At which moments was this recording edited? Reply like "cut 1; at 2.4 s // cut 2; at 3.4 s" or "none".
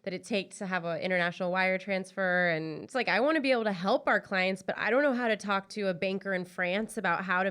cut 1; at 2.9 s